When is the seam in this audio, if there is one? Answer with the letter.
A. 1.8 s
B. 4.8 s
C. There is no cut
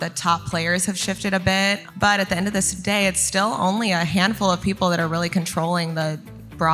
A